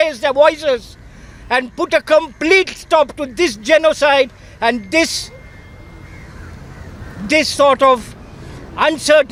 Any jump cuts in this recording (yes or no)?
no